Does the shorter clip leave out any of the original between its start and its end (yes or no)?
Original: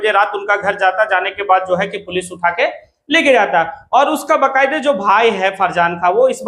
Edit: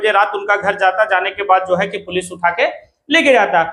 no